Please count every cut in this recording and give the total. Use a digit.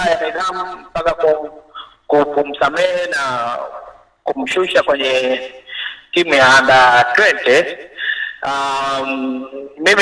0